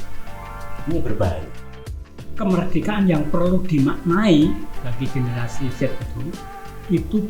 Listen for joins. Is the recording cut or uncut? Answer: cut